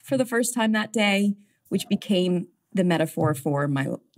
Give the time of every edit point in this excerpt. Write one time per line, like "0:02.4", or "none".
0:02.6

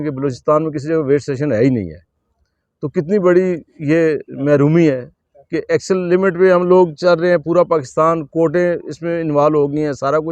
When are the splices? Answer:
none

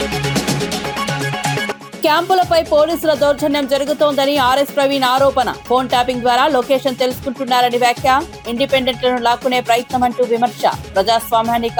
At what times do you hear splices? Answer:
none

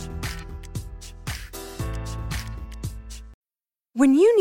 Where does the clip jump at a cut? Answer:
0:03.3

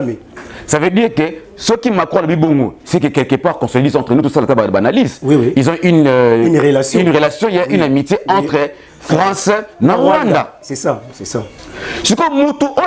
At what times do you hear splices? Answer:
none

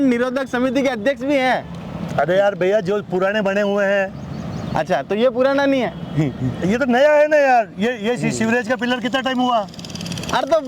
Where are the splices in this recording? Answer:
none

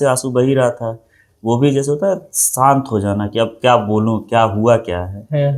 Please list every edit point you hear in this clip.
none

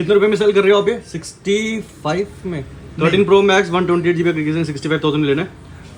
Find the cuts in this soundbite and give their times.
none

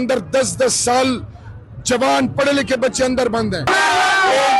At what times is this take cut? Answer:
0:03.7

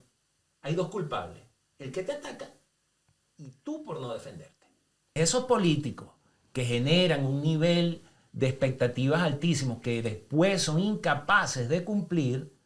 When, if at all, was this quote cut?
0:05.2

